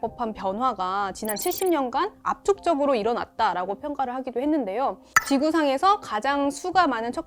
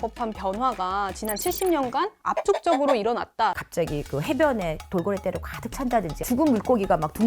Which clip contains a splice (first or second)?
second